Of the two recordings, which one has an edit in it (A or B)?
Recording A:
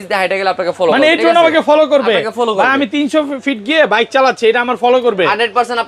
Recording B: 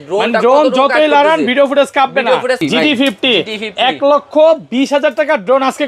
B